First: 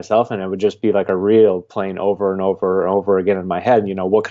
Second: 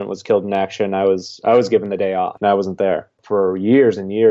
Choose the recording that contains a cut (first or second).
second